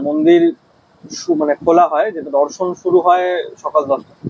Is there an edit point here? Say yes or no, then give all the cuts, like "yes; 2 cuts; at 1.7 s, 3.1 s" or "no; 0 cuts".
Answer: no; 0 cuts